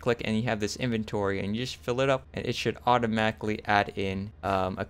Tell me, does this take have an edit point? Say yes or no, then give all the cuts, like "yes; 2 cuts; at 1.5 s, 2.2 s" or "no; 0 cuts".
yes; 1 cut; at 2.3 s